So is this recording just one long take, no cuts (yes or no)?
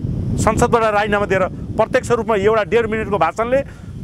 yes